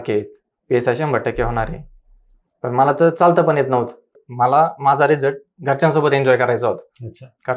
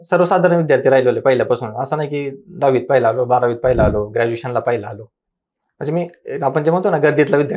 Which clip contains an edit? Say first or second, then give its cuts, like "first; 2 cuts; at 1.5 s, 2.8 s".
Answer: first; 1 cut; at 4.2 s